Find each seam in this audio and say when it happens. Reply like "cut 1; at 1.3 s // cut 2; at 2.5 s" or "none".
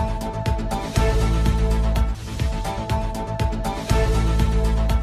none